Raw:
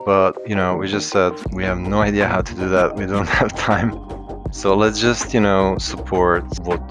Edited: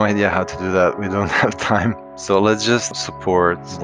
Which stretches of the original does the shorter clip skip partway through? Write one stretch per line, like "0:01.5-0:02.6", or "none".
0:04.1-0:04.5
0:05.3-0:05.8